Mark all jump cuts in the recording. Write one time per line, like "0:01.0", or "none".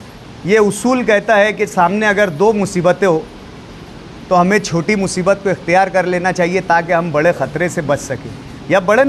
none